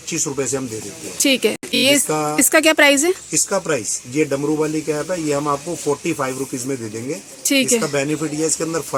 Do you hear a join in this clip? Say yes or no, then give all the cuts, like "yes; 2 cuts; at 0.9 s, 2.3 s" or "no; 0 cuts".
no; 0 cuts